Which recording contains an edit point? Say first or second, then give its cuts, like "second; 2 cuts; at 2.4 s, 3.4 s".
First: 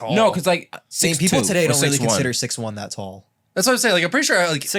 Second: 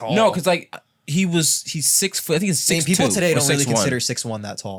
first; 1 cut; at 0.9 s